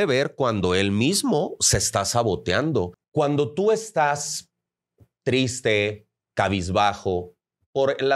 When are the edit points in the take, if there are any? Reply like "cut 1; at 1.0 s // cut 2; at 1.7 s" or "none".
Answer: cut 1; at 3.0 s